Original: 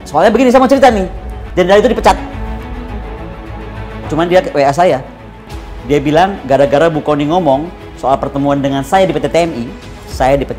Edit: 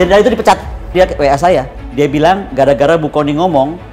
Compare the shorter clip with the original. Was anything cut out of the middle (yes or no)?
yes